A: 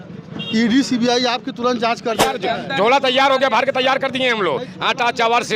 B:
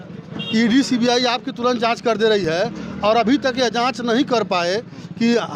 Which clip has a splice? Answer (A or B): A